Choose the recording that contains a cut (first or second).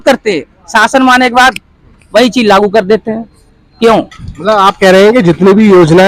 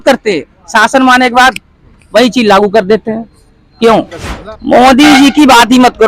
second